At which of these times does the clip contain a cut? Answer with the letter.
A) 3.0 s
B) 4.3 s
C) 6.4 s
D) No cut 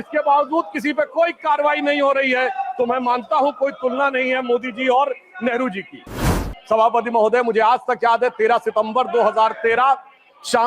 C